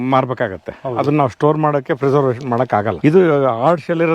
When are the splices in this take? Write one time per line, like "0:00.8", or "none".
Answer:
0:02.9